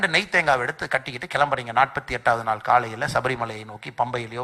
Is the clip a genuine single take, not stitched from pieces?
yes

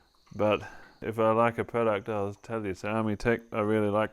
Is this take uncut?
no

